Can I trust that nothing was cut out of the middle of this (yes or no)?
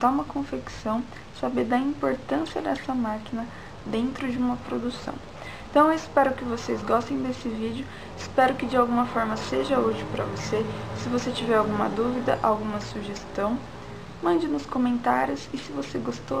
yes